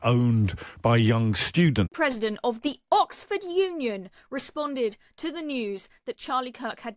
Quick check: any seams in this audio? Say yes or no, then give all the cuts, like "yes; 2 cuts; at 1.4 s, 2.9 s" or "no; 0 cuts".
yes; 1 cut; at 1.9 s